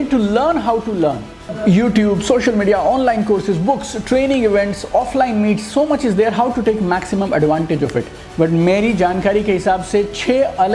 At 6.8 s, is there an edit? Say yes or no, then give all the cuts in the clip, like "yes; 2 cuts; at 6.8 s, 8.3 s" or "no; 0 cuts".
no; 2 cuts; at 1.5 s, 8.2 s